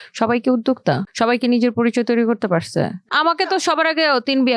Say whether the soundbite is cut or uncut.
cut